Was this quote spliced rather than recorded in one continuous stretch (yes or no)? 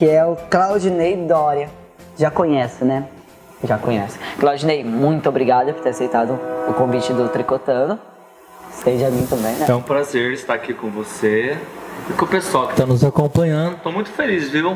yes